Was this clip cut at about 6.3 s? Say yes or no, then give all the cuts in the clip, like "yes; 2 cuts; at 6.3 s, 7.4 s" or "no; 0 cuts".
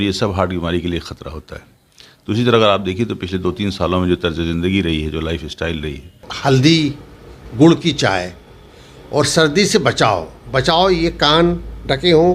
yes; 1 cut; at 6.3 s